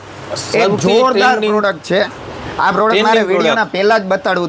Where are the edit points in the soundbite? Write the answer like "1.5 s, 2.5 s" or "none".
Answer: none